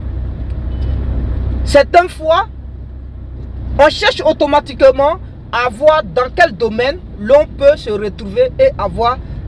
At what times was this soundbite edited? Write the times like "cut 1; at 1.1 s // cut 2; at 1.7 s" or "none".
none